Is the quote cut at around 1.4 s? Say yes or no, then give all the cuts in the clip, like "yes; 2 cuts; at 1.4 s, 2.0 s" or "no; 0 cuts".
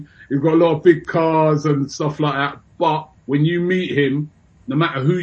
no; 1 cut; at 3.1 s